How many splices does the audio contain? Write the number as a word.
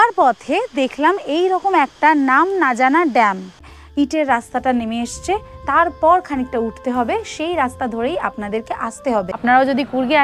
two